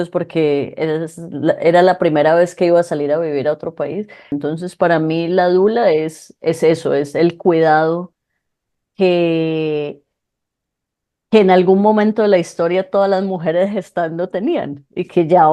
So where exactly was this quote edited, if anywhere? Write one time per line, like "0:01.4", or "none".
0:04.3

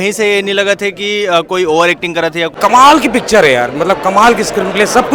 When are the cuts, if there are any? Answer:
0:02.5

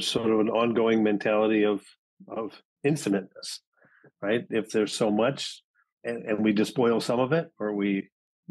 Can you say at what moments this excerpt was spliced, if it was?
none

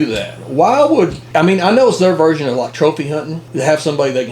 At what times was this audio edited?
0:01.3
0:03.4

